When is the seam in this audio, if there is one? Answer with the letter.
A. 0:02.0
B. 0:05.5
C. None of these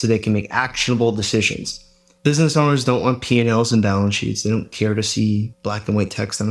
B